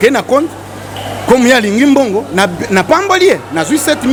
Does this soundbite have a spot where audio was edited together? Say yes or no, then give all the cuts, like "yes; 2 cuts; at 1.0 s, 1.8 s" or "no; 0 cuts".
no; 0 cuts